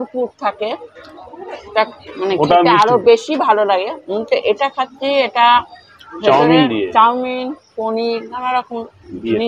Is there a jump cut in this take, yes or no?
no